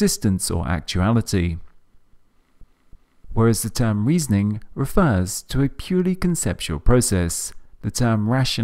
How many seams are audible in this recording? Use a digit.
1